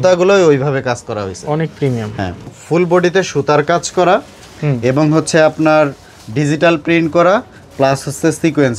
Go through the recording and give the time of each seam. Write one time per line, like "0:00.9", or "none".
0:02.6